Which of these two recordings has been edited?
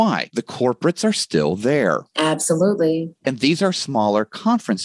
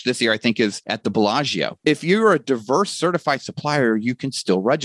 second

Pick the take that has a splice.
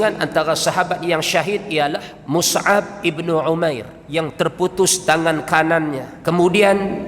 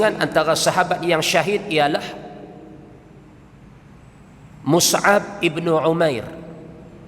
first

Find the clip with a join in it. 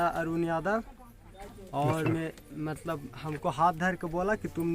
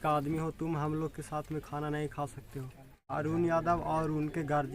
second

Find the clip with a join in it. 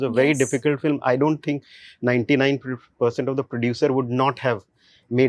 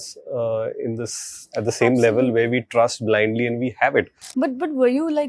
second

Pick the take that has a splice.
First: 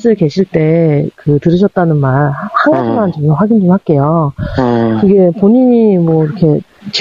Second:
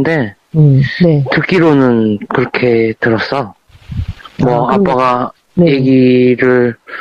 second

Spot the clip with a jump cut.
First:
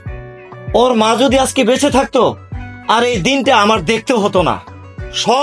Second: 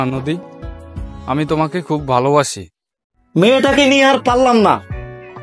second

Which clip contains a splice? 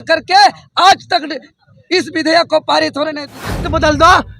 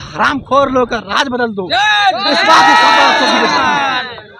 first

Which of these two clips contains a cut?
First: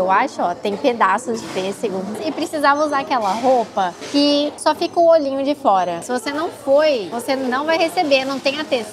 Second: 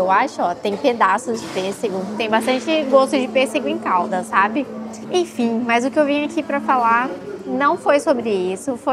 first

